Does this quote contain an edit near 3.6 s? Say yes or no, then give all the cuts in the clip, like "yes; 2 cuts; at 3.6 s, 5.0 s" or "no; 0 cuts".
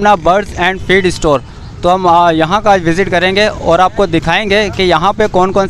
no; 0 cuts